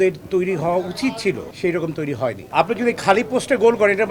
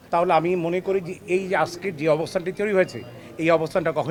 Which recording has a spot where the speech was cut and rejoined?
first; 2 cuts; at 1.4 s, 2.5 s

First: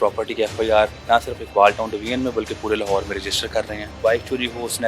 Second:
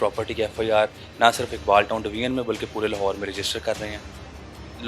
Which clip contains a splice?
first; 2 cuts; at 1.0 s, 4.0 s

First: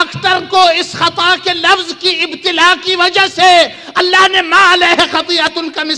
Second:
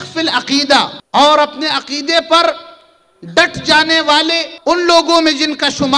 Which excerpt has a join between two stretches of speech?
second; 2 cuts; at 1.0 s, 4.5 s

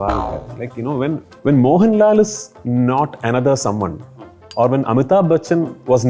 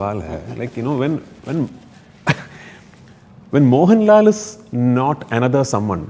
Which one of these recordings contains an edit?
first; 1 cut; at 1.3 s

